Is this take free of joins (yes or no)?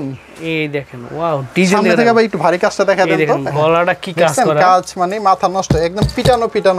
yes